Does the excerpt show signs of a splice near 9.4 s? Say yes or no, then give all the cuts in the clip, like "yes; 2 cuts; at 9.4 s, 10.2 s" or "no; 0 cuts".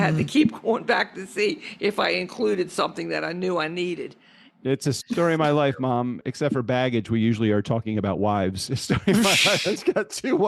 no; 2 cuts; at 5.0 s, 6.2 s